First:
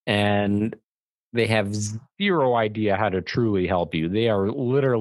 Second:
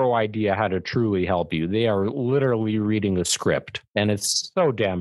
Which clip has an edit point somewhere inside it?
second; 1 cut; at 3.8 s

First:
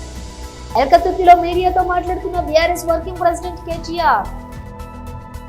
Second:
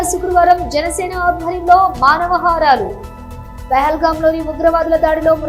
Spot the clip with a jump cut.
first; 2 cuts; at 0.7 s, 4.3 s

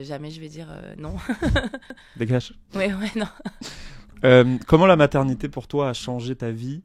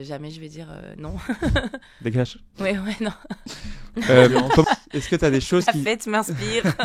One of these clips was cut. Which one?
second; 2 cuts; at 1.9 s, 4.6 s

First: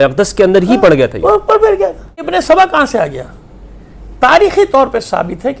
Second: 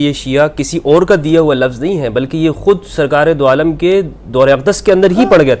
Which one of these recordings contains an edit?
first; 1 cut; at 2.3 s

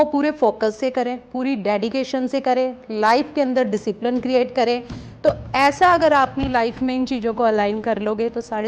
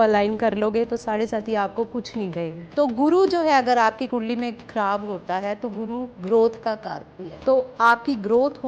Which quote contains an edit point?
second; 2 cuts; at 2.6 s, 7.3 s

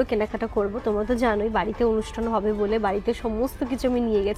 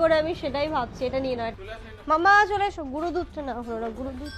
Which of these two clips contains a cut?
second; 1 cut; at 1.6 s

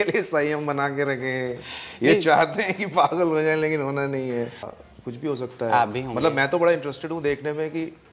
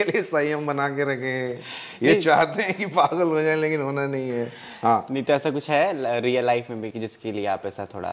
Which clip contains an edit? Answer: first; 1 cut; at 4.7 s

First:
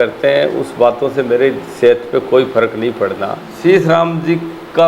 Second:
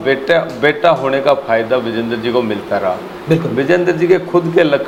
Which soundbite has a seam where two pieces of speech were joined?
first; 1 cut; at 3.5 s

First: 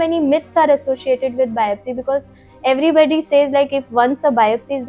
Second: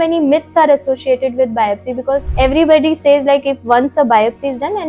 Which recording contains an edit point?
second; 1 cut; at 2.3 s

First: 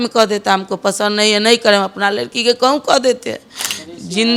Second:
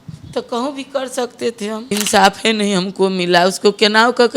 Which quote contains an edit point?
second; 1 cut; at 1.9 s

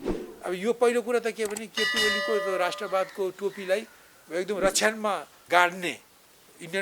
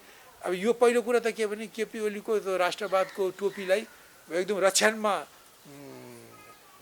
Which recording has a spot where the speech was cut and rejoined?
first; 1 cut; at 5.3 s

